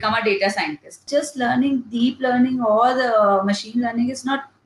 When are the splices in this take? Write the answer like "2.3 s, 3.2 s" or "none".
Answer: 1.1 s